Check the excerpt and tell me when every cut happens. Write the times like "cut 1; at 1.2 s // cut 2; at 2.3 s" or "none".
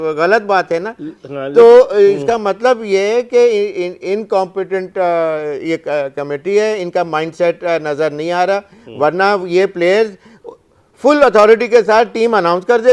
none